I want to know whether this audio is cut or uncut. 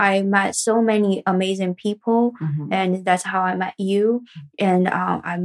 uncut